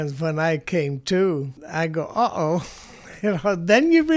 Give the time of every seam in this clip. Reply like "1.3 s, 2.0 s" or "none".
1.6 s